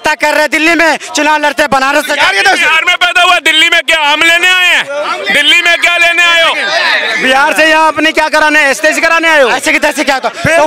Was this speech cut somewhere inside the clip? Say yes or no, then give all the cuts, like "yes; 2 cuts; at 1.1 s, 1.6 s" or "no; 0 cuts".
no; 0 cuts